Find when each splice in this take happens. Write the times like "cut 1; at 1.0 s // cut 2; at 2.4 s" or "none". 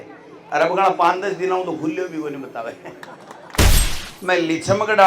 cut 1; at 3.8 s